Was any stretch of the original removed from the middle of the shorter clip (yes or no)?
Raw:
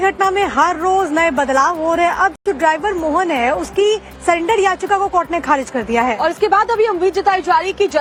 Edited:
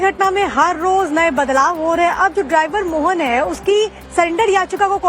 yes